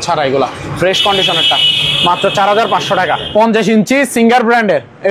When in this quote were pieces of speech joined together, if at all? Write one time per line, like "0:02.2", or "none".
0:03.2